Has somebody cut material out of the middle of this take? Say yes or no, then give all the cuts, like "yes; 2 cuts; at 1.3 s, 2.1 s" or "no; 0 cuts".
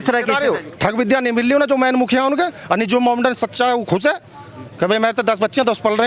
no; 0 cuts